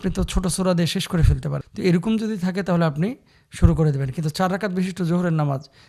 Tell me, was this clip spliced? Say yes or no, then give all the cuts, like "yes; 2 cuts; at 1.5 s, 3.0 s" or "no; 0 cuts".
yes; 1 cut; at 1.6 s